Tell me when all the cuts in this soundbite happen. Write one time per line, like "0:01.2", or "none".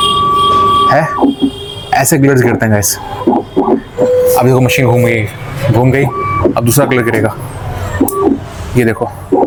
none